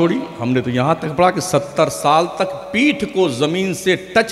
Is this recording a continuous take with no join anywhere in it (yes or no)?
yes